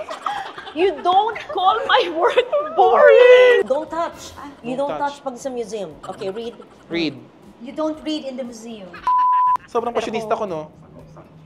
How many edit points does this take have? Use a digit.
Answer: 3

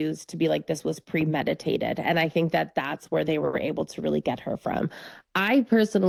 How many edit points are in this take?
0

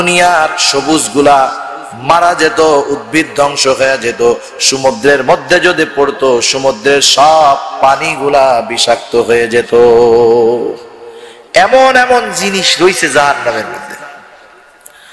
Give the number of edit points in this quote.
0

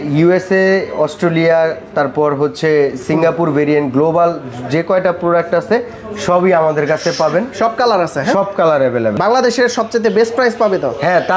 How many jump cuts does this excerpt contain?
0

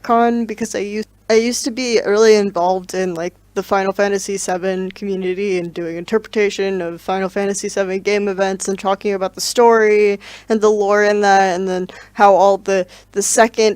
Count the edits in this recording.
1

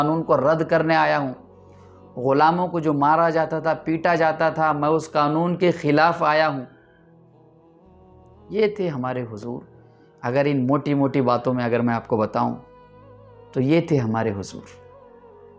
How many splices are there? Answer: 1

